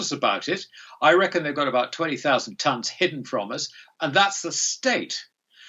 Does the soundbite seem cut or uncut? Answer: uncut